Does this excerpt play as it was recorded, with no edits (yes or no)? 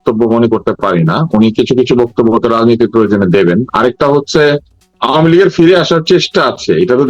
no